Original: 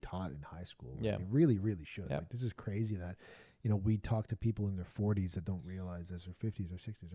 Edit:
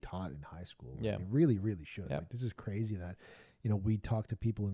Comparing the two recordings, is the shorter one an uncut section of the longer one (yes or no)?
yes